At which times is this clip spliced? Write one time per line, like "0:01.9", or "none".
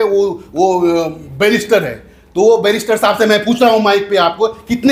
none